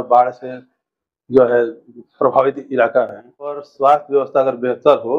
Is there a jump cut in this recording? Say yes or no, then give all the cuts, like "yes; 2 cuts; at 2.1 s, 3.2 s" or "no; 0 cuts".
yes; 1 cut; at 3.7 s